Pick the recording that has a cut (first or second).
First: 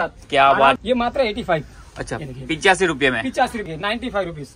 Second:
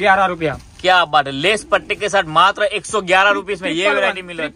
first